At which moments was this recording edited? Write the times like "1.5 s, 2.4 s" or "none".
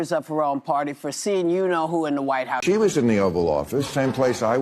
2.6 s